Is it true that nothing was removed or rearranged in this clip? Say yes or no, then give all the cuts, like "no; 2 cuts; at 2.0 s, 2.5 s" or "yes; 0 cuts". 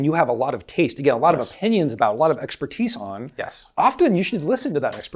yes; 0 cuts